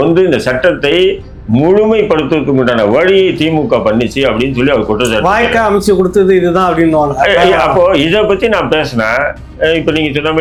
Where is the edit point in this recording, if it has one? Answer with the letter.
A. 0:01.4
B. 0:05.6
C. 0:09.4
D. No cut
D